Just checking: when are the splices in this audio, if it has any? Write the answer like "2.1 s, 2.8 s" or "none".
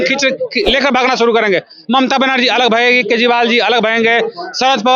none